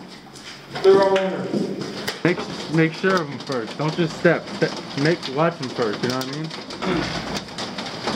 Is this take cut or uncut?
cut